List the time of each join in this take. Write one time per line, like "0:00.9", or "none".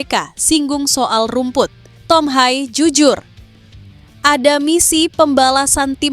0:01.9